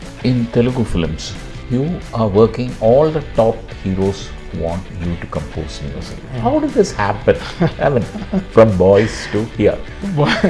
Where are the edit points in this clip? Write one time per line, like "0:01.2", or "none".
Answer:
none